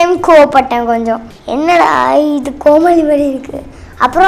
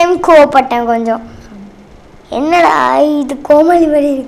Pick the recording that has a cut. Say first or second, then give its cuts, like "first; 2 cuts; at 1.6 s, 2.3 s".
first; 1 cut; at 1.3 s